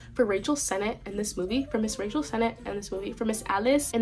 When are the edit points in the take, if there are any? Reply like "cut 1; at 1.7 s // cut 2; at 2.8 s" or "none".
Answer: none